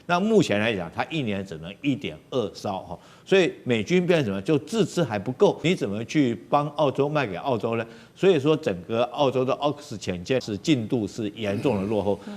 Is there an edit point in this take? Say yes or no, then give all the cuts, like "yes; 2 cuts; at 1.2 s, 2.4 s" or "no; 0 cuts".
yes; 2 cuts; at 5.6 s, 10.4 s